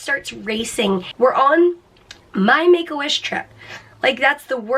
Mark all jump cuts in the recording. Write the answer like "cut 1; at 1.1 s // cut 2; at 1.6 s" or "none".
cut 1; at 1.1 s